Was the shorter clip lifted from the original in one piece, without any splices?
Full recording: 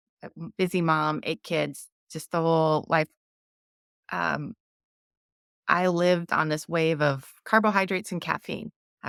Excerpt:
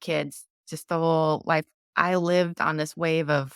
no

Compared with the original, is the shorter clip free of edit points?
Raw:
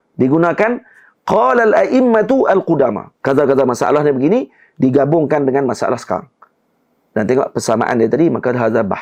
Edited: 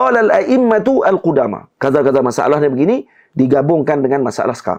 yes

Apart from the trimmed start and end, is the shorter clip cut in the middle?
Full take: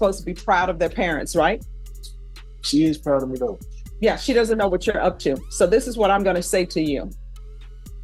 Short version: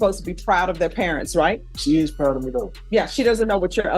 yes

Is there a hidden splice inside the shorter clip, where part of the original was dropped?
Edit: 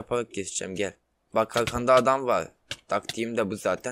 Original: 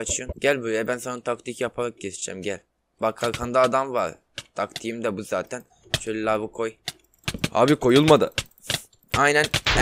no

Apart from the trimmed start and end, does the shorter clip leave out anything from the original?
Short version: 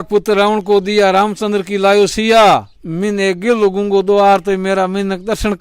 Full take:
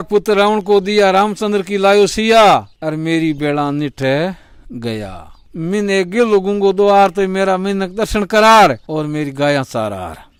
yes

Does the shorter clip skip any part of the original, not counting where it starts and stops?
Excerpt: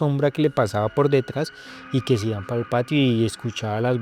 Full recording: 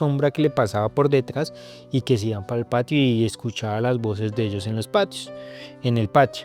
no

